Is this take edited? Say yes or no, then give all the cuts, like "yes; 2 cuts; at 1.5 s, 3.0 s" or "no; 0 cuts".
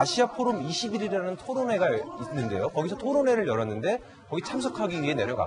no; 0 cuts